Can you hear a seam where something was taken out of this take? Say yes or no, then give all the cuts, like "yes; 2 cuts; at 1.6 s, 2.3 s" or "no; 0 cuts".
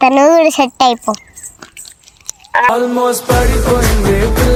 no; 0 cuts